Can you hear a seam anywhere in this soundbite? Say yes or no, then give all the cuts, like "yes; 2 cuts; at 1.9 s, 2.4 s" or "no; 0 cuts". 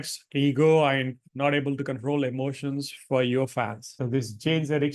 no; 0 cuts